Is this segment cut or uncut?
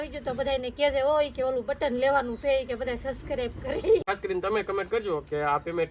cut